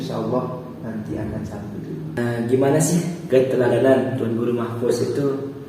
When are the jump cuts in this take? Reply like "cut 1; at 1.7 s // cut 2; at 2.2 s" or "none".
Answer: cut 1; at 2.2 s

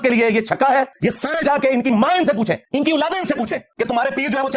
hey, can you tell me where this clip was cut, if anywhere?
cut 1; at 0.9 s // cut 2; at 2.6 s // cut 3; at 3.7 s

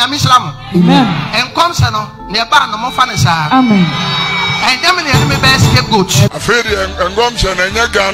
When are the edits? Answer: none

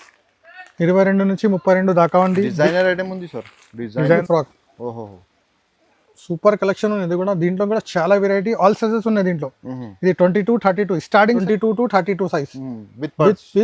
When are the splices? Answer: cut 1; at 4.2 s // cut 2; at 11.4 s

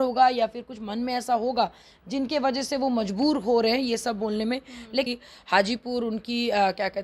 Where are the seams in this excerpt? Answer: cut 1; at 5.1 s

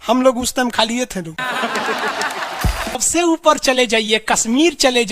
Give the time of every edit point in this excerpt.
cut 1; at 3.0 s

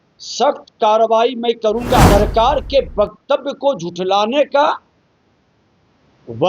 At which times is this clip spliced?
cut 1; at 2.1 s

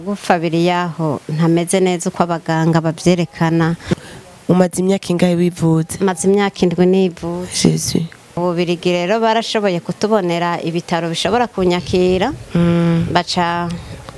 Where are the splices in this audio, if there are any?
cut 1; at 3.8 s // cut 2; at 8.4 s

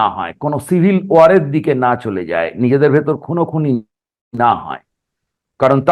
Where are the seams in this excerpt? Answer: none

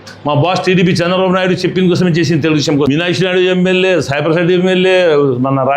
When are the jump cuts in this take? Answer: cut 1; at 2.9 s

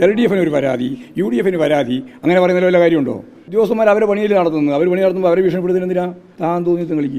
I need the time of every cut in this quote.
cut 1; at 3.5 s // cut 2; at 6.2 s

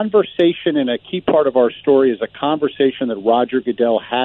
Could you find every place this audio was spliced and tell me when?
none

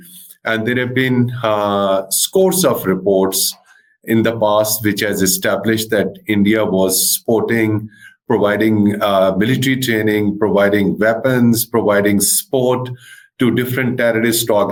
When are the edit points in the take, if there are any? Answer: none

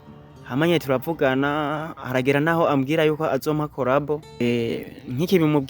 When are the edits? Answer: cut 1; at 4.4 s

